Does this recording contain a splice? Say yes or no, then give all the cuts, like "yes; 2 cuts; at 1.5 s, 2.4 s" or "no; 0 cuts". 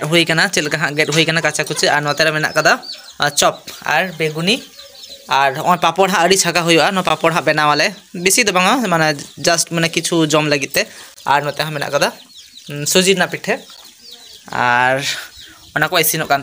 no; 0 cuts